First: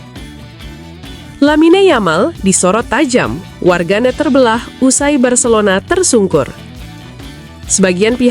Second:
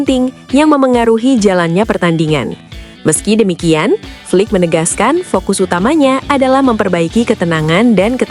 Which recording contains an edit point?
first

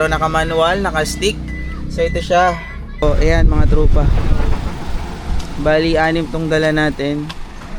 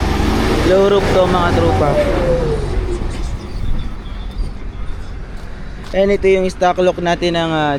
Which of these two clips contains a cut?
first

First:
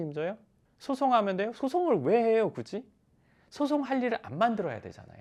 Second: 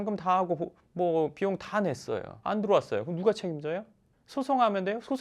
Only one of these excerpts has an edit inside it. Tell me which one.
second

